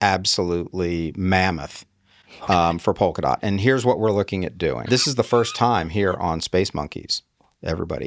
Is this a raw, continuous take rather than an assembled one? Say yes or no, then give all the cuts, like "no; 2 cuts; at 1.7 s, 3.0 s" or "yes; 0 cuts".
no; 1 cut; at 4.8 s